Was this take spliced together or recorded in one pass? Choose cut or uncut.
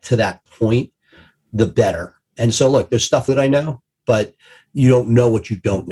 cut